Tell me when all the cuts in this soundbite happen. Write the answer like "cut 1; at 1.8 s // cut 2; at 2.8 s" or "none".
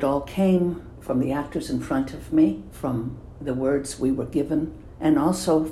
cut 1; at 0.9 s // cut 2; at 2.7 s // cut 3; at 4.8 s